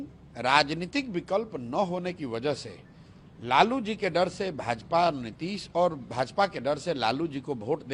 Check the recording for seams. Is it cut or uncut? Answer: uncut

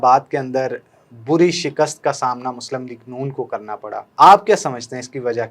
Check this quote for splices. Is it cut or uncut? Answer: cut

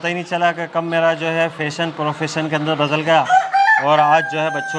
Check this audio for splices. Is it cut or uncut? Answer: uncut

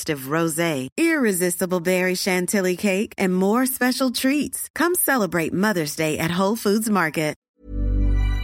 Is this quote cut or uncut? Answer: cut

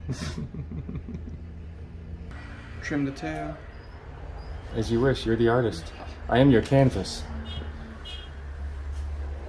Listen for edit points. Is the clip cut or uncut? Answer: cut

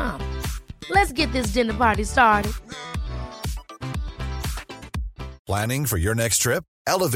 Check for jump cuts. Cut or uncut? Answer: cut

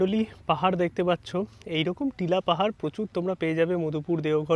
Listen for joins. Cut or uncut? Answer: uncut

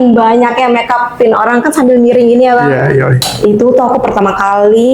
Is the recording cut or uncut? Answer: cut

